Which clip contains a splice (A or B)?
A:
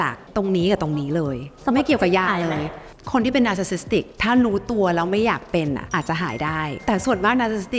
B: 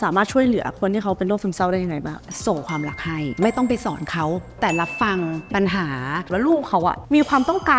B